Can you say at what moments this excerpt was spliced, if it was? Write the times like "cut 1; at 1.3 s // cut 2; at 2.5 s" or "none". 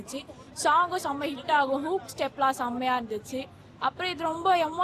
none